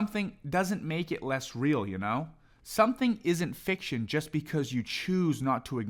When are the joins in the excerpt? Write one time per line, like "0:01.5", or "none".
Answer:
none